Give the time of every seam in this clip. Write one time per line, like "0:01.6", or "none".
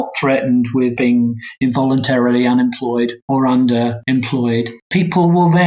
0:01.0
0:03.2
0:04.0
0:04.8